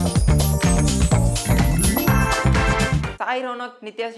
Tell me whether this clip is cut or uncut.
cut